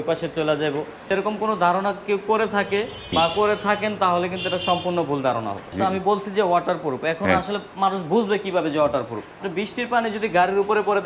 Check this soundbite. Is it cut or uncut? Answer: cut